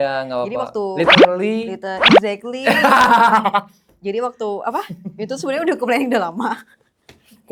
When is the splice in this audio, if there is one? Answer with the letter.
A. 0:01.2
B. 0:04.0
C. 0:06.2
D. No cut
D